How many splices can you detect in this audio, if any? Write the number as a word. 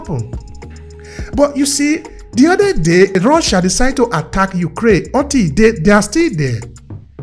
one